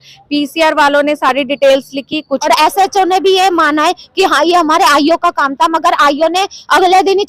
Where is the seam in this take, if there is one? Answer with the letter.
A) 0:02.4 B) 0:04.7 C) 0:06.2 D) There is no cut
A